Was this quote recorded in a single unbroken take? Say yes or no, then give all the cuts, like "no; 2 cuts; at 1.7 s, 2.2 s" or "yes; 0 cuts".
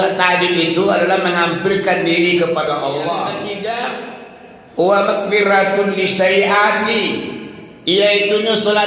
no; 1 cut; at 3.4 s